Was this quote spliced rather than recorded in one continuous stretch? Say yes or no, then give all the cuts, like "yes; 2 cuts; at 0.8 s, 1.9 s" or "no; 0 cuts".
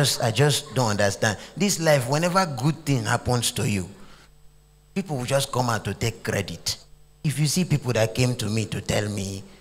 yes; 1 cut; at 7.2 s